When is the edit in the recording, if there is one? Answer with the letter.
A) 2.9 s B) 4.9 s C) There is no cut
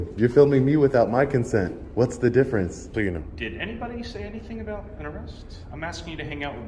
A